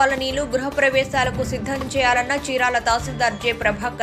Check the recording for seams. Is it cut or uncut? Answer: uncut